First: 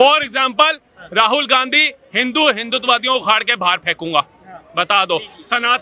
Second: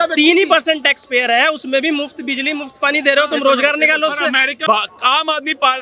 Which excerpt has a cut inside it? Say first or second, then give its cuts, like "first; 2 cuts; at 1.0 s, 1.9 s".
second; 1 cut; at 4.5 s